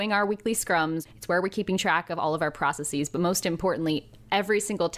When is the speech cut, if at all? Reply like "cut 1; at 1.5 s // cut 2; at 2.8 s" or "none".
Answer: cut 1; at 1.0 s